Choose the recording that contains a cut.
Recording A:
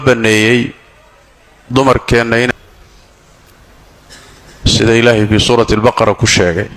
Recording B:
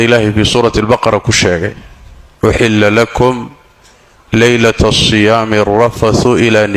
A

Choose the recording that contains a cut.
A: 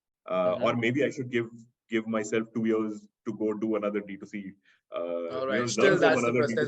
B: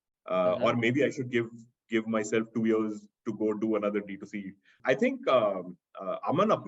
B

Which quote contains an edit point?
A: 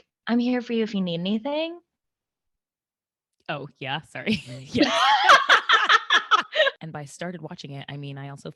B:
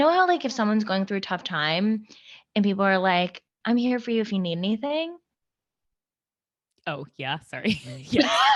A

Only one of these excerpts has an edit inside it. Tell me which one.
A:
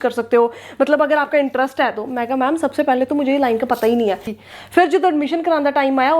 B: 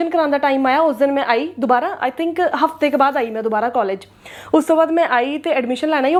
A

